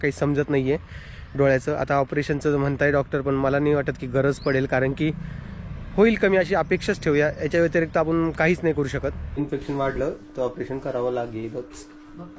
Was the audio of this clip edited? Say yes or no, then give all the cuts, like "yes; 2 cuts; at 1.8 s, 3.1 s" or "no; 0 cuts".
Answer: yes; 1 cut; at 9.4 s